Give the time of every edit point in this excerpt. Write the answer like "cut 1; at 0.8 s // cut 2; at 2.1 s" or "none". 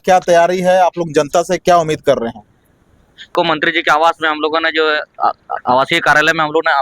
cut 1; at 3.3 s